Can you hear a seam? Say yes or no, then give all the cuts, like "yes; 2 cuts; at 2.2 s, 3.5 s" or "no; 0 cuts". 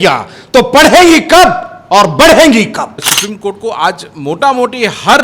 yes; 1 cut; at 2.9 s